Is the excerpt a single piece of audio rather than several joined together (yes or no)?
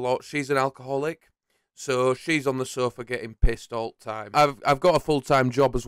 yes